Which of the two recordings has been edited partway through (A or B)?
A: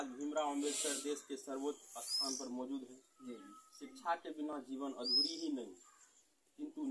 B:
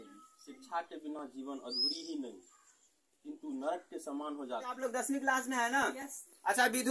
B